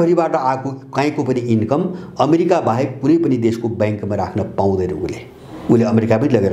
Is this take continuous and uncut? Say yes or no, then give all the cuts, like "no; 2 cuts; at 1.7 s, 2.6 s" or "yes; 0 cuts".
yes; 0 cuts